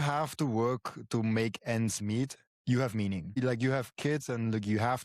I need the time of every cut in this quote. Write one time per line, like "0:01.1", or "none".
0:02.5
0:03.4